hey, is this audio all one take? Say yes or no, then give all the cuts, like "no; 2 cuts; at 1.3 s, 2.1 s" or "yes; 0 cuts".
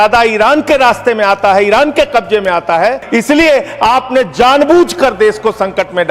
no; 1 cut; at 3.0 s